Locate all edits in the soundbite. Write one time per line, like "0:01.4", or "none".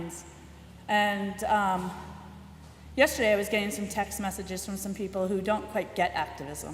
0:04.8